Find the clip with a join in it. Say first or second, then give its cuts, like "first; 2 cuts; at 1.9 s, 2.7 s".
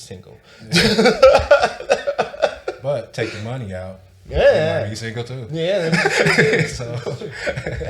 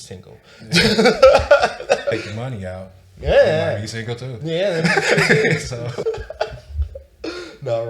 second; 2 cuts; at 2.1 s, 6.0 s